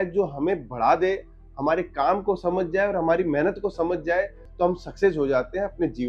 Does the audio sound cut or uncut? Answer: cut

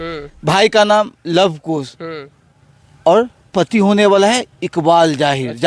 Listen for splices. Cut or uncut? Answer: uncut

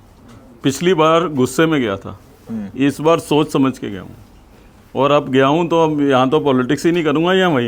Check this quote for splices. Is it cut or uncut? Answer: uncut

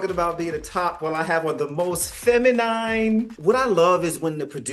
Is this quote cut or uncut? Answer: cut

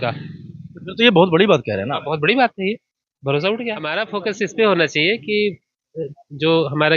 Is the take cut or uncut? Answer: cut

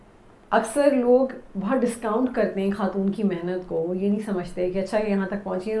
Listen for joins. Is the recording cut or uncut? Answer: uncut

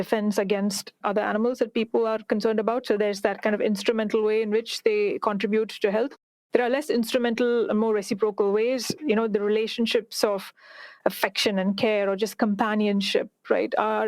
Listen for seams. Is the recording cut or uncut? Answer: cut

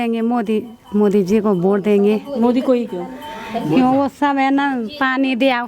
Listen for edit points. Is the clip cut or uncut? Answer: uncut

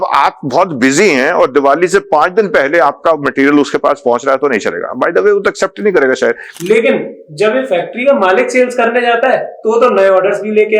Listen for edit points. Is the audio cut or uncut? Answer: cut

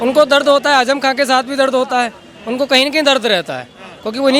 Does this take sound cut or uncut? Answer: uncut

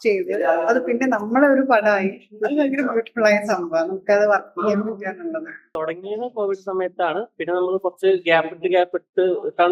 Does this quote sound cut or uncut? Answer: cut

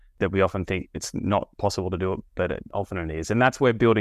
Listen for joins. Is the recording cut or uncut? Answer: cut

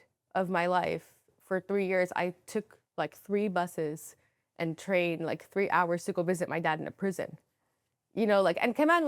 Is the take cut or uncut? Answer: uncut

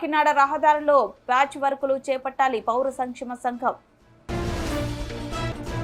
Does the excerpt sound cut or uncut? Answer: uncut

